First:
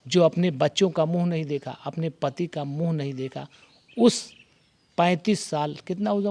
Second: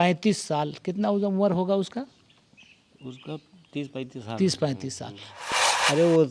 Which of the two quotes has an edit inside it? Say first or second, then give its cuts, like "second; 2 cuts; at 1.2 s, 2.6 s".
second; 1 cut; at 5.3 s